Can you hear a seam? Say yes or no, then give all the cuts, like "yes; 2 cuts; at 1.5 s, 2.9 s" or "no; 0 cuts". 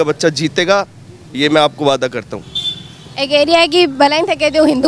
no; 0 cuts